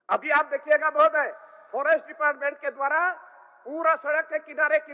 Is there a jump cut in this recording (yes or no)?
no